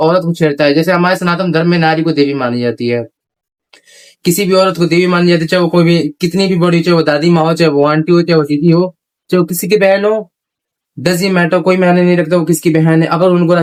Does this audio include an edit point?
no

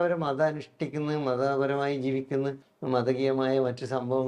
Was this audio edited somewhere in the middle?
yes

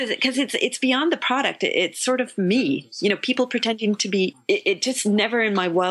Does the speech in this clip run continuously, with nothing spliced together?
yes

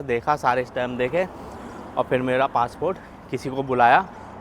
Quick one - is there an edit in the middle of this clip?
no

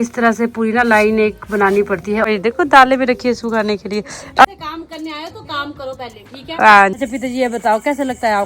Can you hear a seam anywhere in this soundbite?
yes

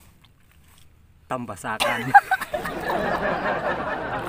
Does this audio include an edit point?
yes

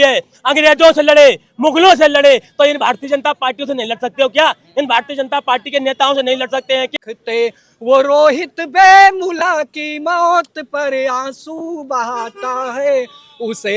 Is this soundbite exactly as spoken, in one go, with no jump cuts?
no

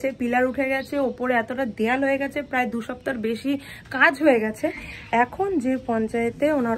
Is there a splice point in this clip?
no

